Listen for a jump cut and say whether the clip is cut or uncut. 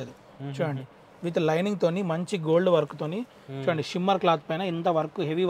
uncut